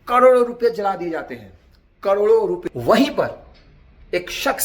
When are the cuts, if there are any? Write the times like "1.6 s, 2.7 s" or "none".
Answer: 2.7 s